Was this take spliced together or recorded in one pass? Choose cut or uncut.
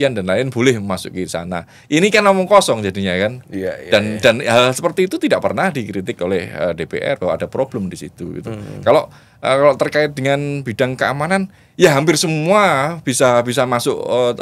uncut